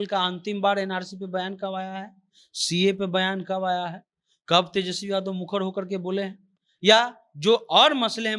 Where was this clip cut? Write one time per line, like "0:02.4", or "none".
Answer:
none